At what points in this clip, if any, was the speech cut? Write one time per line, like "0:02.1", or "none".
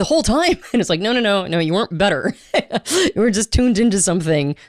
none

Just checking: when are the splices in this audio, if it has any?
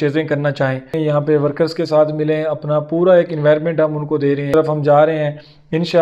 0:00.9
0:04.5

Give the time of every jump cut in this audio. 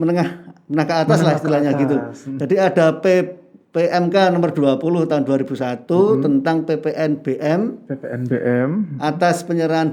none

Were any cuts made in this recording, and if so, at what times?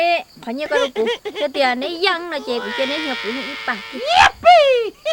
0:04.0

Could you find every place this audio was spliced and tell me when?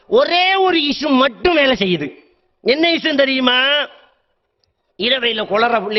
none

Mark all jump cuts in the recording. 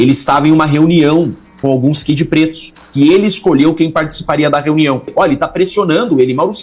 0:05.1

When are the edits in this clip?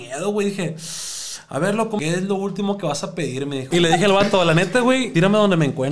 0:02.0
0:03.6
0:05.1

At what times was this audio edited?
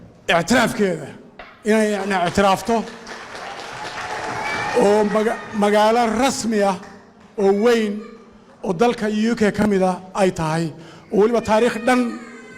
none

